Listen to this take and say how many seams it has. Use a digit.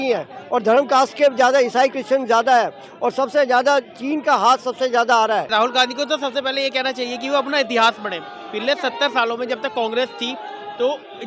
1